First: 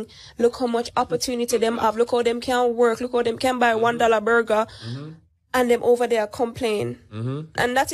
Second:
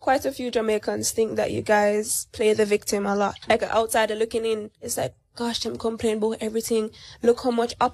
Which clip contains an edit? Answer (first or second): second